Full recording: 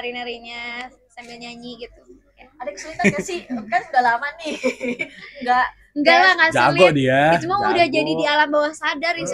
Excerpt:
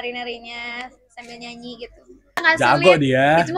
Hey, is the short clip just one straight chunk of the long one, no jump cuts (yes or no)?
no